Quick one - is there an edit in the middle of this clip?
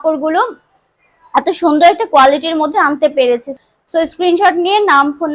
yes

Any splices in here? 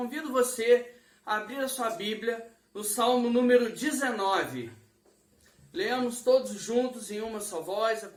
no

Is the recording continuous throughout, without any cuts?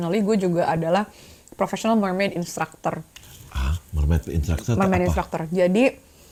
yes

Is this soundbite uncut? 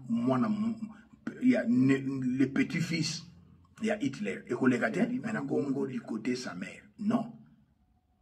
no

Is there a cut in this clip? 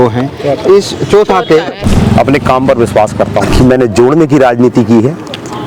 yes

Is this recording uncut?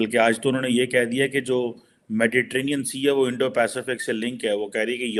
yes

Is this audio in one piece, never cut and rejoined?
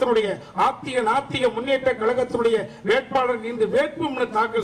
yes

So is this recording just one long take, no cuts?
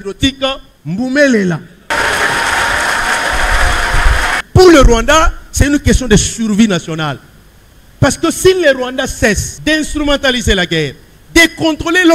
no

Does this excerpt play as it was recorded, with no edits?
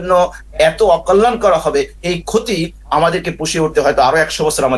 yes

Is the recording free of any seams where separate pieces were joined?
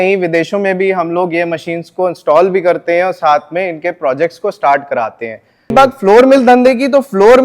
no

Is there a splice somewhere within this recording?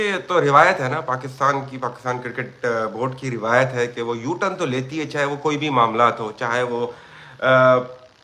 no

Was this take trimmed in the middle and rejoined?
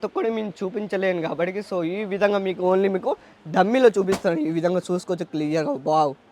no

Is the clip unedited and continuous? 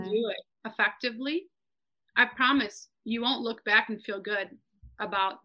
yes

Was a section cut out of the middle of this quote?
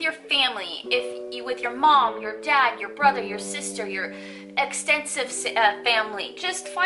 no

